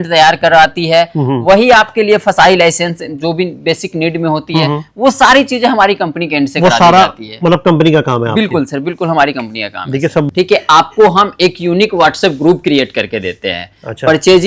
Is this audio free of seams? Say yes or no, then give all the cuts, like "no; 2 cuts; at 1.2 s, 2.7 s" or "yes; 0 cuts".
yes; 0 cuts